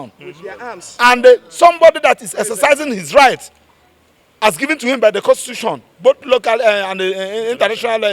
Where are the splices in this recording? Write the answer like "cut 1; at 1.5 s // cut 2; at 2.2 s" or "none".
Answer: none